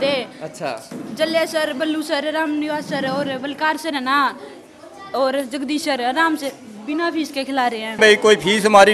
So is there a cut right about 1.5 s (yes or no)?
no